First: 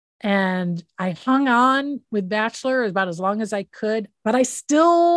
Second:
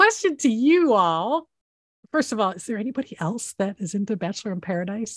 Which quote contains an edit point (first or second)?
first